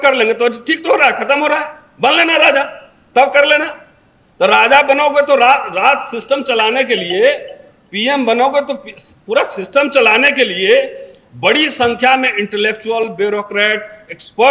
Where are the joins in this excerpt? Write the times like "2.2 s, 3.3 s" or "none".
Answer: none